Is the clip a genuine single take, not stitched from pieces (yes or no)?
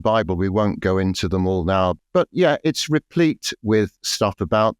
no